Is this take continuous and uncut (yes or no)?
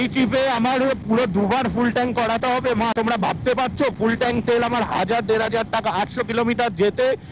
no